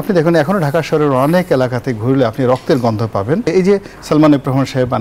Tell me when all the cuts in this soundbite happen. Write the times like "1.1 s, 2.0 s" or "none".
3.5 s